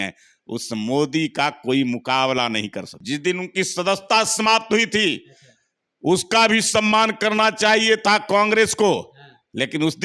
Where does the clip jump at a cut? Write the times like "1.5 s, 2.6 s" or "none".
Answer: 2.9 s